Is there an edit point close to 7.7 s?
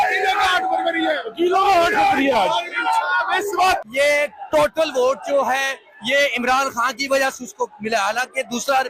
no; 1 cut; at 3.8 s

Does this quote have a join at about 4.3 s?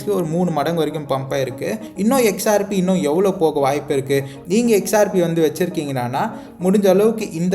yes; 2 cuts; at 1.9 s, 4.3 s

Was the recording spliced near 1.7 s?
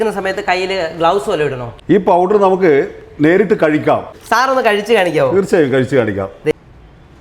yes; 3 cuts; at 1.7 s, 4.1 s, 6.5 s

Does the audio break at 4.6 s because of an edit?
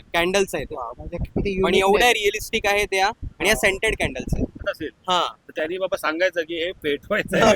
yes; 1 cut; at 4.6 s

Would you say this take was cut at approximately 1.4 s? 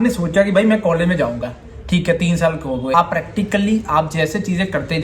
no; 1 cut; at 2.9 s

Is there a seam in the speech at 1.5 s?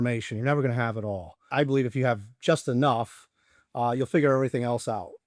yes; 1 cut; at 1.5 s

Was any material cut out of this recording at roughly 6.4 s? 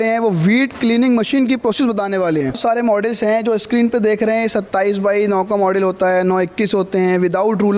no; 1 cut; at 2.6 s

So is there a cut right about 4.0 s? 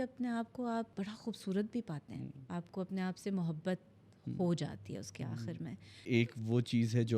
no; 3 cuts; at 0.9 s, 2.4 s, 6.1 s

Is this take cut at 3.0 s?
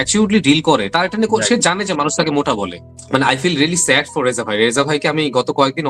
yes; 1 cut; at 3.0 s

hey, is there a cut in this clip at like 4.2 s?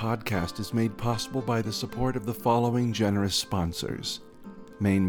no; 0 cuts

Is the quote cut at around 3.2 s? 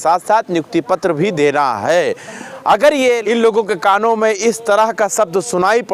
yes; 1 cut; at 3.2 s

